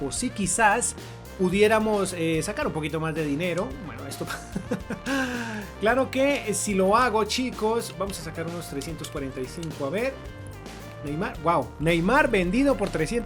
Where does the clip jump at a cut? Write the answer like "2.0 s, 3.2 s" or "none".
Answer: none